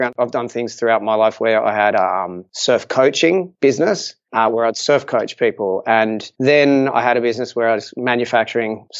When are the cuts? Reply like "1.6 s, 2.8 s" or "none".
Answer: 4.2 s